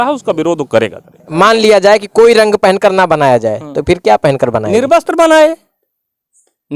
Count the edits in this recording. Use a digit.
1